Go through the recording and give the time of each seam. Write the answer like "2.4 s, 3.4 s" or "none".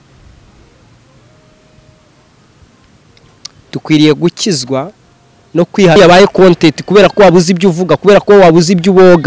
6.0 s

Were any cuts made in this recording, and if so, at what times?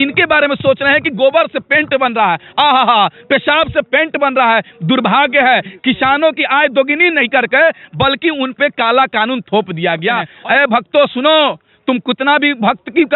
10.3 s

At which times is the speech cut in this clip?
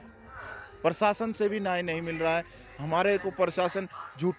none

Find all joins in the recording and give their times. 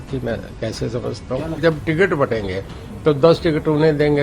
1.6 s

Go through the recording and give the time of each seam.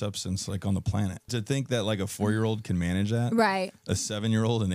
1.3 s

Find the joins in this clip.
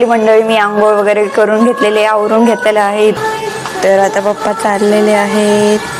3.2 s

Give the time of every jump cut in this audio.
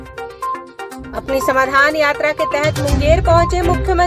1.0 s

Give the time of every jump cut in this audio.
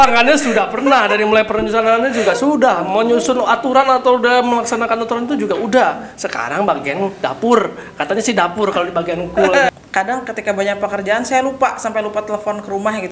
9.7 s

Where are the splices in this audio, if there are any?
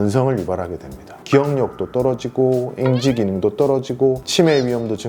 1.1 s

